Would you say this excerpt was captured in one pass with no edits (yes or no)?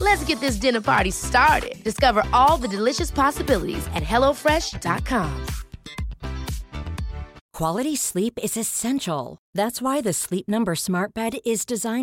no